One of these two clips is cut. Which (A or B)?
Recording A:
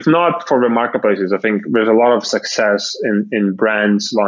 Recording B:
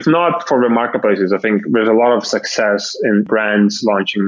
B